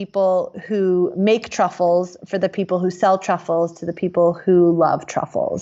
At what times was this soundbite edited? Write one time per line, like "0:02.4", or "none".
none